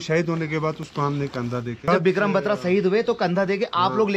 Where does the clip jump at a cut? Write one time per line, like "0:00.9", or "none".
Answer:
0:01.9